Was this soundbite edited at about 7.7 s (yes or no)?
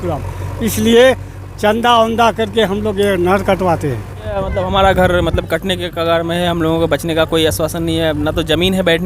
no